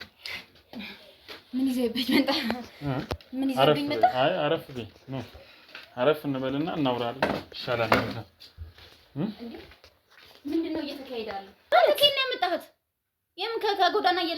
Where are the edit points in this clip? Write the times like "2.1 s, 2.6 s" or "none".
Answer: 11.6 s